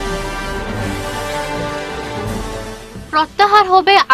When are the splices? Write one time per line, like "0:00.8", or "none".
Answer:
none